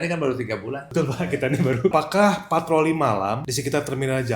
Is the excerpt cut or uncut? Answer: cut